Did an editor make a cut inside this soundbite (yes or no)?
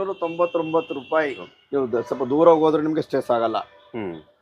yes